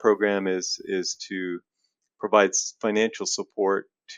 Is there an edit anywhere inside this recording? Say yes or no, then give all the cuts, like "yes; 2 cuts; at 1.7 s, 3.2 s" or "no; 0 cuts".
no; 0 cuts